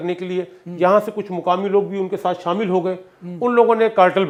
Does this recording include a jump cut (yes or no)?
no